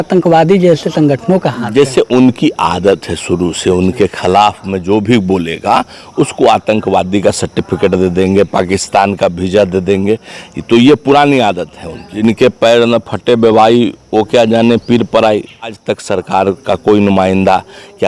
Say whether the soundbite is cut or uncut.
cut